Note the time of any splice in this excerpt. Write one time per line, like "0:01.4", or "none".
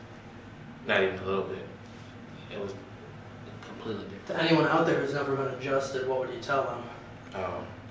0:04.2